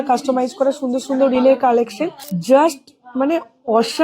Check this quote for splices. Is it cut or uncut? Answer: cut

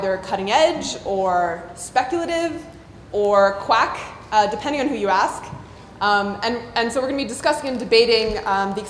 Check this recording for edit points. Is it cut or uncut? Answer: uncut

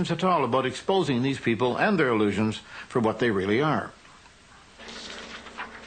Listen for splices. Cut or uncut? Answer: uncut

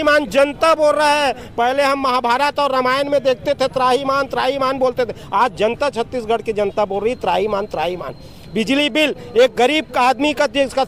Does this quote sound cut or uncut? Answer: uncut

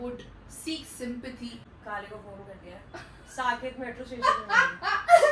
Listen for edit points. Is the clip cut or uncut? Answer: cut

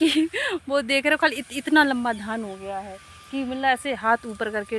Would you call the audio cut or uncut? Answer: uncut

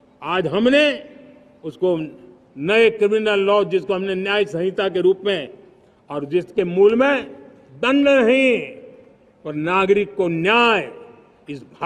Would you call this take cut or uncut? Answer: uncut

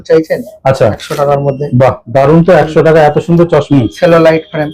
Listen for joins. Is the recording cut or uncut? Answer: cut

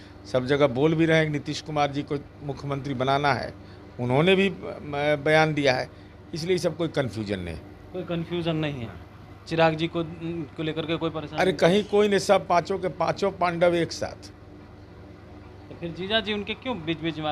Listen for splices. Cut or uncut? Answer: uncut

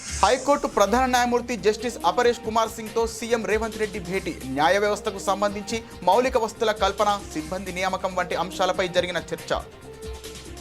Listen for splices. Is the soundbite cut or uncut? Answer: uncut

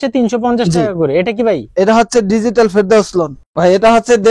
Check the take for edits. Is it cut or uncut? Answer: cut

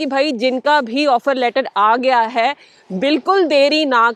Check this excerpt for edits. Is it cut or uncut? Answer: uncut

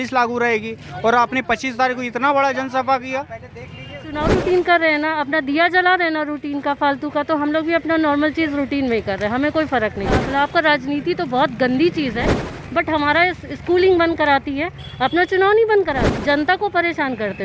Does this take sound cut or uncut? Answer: cut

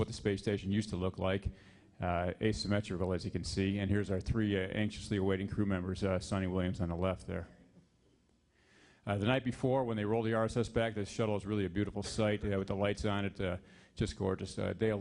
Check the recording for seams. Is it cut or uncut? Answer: uncut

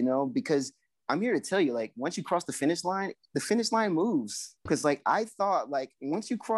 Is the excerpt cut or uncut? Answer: uncut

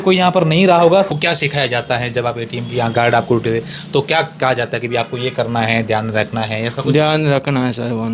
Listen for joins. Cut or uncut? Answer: cut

